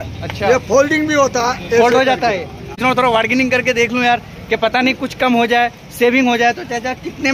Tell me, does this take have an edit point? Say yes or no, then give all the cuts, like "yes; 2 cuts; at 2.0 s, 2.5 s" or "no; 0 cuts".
yes; 1 cut; at 2.7 s